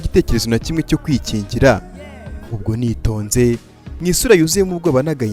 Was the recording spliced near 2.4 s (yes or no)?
yes